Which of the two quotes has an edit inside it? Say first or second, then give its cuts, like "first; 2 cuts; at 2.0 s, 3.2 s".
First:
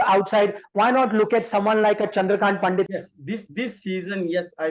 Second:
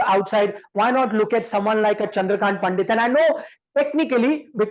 first; 1 cut; at 2.9 s